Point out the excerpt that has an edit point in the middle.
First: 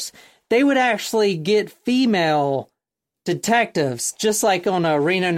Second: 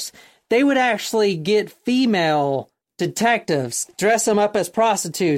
second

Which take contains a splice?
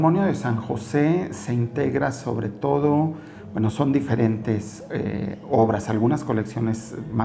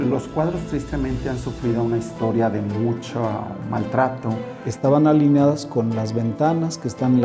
second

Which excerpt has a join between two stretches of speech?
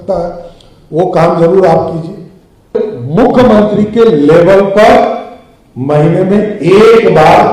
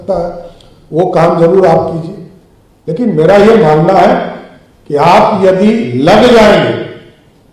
first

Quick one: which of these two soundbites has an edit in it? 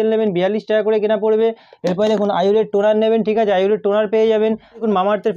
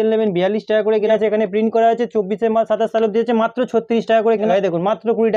second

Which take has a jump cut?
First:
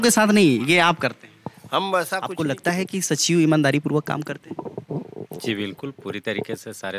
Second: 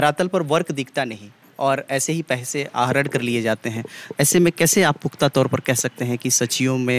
first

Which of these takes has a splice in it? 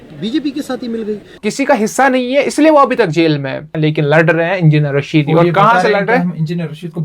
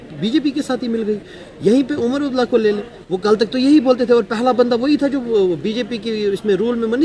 first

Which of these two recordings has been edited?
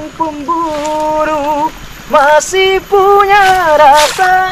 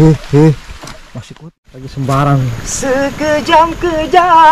second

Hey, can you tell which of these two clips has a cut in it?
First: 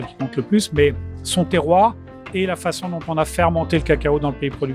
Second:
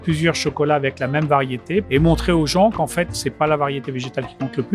second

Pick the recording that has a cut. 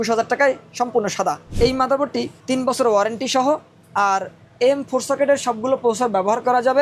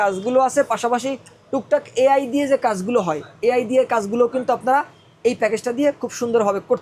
first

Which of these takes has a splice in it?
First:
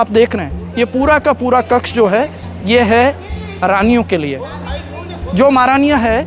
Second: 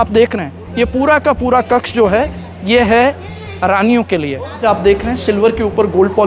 second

